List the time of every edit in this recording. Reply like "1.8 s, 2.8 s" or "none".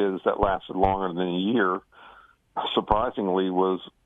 none